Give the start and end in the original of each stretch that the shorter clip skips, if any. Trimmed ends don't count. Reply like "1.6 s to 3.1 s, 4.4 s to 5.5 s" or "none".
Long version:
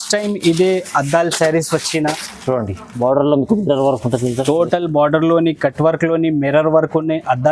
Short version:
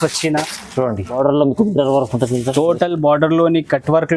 2.8 s to 3.0 s